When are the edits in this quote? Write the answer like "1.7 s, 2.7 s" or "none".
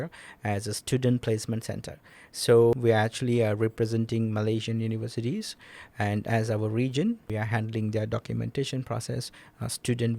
2.7 s, 7.3 s